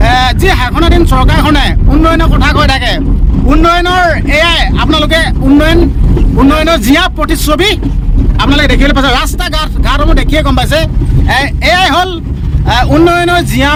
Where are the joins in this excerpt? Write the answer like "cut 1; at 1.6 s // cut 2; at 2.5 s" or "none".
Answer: none